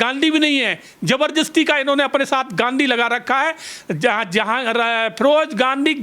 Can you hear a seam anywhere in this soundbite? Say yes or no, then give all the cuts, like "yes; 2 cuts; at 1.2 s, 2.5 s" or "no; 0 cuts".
no; 0 cuts